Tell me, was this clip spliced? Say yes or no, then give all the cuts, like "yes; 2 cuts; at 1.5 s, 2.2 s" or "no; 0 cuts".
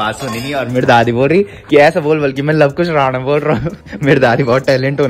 no; 0 cuts